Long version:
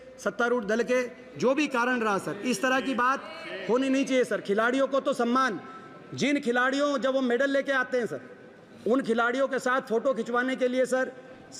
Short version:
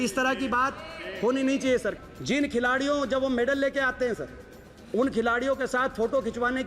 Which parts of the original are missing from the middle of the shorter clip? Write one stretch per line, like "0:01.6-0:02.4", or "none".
0:04.4-0:05.9

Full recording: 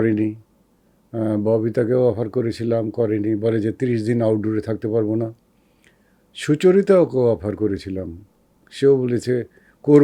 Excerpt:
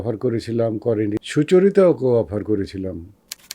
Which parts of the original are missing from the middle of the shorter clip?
0:03.3-0:06.3

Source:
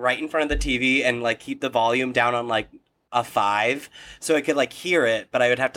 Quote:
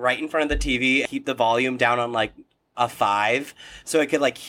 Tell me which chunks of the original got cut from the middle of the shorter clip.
0:01.0-0:01.4

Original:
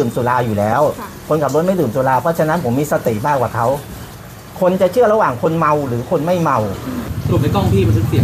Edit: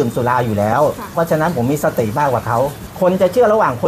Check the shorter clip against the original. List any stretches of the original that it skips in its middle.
0:01.1-0:02.2
0:03.9-0:04.4

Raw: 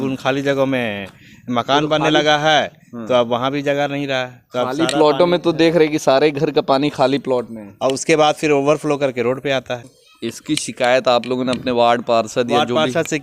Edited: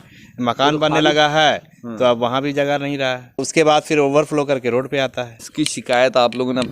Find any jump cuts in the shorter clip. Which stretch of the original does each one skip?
0:04.5-0:07.9
0:09.9-0:10.3

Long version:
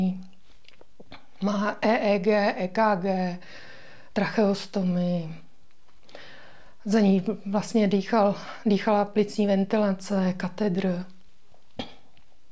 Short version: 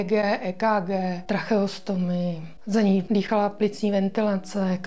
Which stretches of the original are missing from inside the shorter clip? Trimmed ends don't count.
0:03.3-0:04.1
0:05.4-0:06.7
0:07.2-0:08.6

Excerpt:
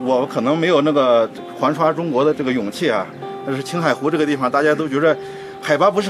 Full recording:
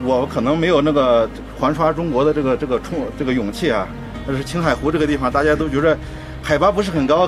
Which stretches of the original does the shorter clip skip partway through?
0:02.3-0:03.2

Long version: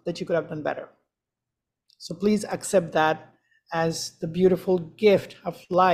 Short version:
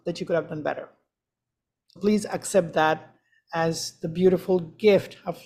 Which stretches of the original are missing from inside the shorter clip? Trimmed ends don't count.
0:02.0-0:02.2

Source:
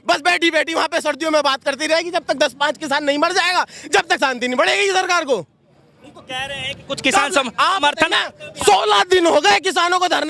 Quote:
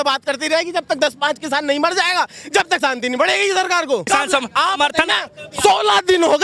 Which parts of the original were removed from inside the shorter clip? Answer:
0:05.5-0:07.1

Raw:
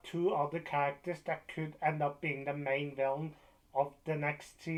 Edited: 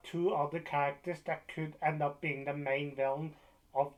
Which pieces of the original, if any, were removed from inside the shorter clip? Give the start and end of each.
none

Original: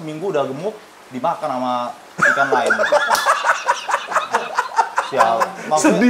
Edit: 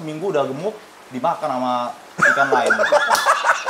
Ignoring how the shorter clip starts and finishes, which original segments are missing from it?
none

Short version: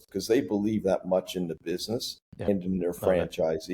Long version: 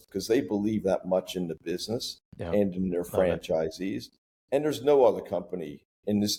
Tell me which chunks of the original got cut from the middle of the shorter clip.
0:02.5-0:02.6

